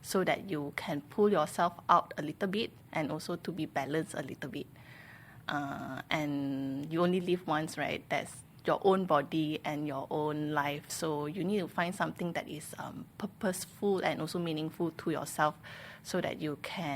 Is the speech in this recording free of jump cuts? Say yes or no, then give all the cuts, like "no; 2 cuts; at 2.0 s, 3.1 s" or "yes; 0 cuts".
yes; 0 cuts